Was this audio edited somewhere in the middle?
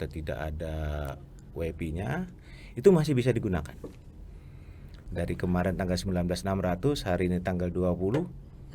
yes; 1 cut; at 5.0 s

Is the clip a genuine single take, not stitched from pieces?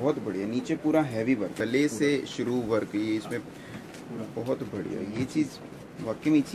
no; 1 cut; at 1.5 s

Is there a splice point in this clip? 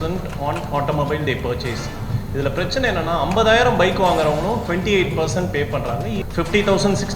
yes; 1 cut; at 6.2 s

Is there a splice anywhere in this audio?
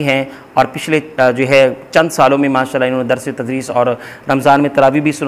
no; 0 cuts

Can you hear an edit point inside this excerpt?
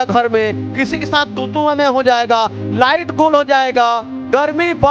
no; 0 cuts

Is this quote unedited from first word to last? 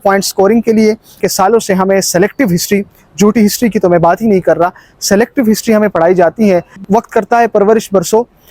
no; 2 cuts; at 1.2 s, 6.8 s

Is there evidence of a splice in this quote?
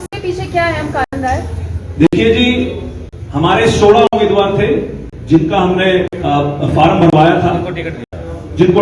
no; 0 cuts

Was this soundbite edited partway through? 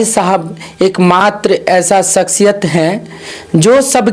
no; 0 cuts

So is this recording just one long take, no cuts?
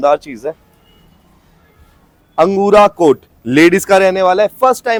yes; 0 cuts

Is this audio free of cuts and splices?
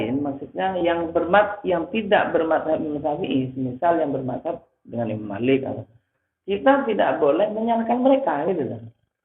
yes; 0 cuts

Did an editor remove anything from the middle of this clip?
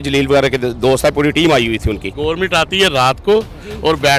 yes; 1 cut; at 2.1 s

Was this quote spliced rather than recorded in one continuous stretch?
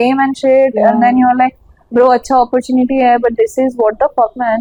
no; 0 cuts

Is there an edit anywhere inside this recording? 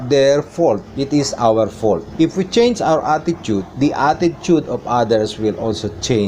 yes; 3 cuts; at 0.9 s, 2.1 s, 3.7 s

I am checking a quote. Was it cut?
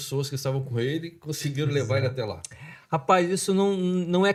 no; 0 cuts

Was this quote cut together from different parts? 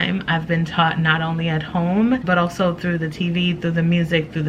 yes; 1 cut; at 2.2 s

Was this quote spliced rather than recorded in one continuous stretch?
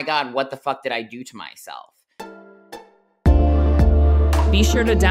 yes; 1 cut; at 2.1 s

